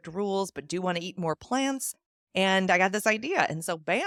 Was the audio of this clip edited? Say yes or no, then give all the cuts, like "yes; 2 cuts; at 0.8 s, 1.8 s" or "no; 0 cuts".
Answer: no; 0 cuts